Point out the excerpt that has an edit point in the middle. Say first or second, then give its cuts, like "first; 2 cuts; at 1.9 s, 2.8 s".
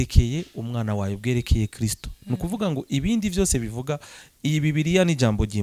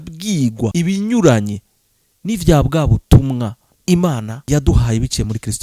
second; 3 cuts; at 0.7 s, 3.7 s, 4.3 s